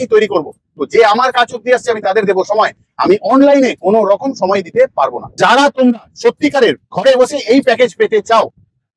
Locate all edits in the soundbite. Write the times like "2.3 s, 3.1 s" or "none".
5.2 s